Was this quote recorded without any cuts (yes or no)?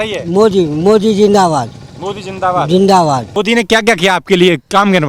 no